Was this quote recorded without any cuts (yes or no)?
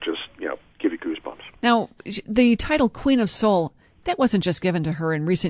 yes